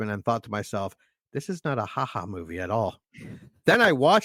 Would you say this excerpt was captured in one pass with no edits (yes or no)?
yes